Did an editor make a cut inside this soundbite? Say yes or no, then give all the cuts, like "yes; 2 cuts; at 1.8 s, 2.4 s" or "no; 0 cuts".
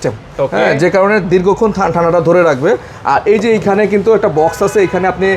no; 0 cuts